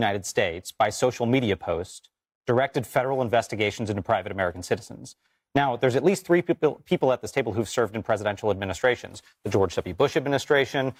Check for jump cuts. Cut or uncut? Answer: uncut